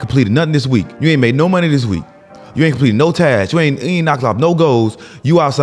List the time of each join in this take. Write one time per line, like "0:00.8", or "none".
0:00.9

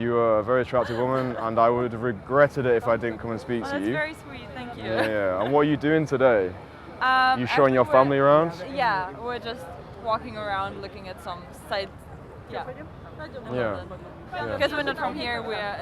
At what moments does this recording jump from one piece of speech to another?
none

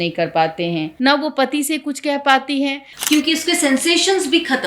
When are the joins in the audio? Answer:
0:00.9
0:02.8

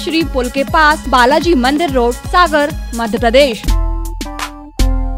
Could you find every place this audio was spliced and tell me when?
0:01.0
0:02.2
0:03.7

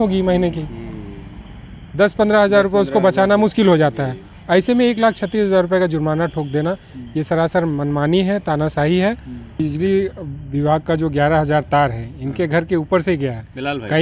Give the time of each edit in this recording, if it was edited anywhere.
0:09.6

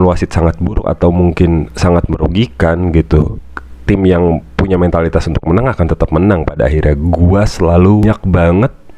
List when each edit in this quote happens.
0:08.0

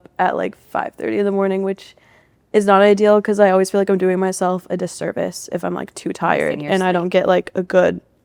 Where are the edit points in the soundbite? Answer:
none

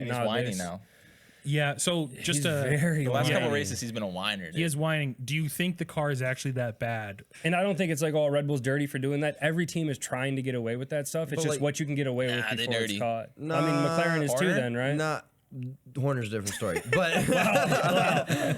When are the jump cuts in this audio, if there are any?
0:07.2

